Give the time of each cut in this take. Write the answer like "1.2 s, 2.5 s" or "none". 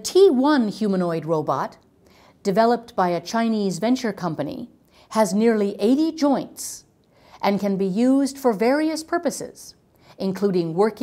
none